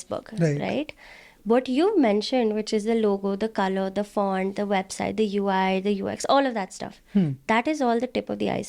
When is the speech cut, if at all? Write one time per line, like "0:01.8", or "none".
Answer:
none